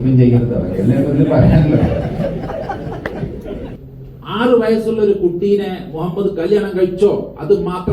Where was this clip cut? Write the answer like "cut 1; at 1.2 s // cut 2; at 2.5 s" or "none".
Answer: cut 1; at 3.8 s